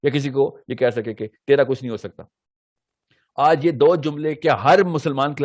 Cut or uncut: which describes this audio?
uncut